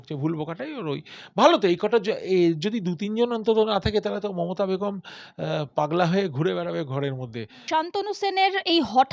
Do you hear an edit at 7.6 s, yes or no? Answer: yes